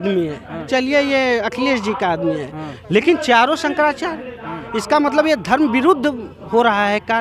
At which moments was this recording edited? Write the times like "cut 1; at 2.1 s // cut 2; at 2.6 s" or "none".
none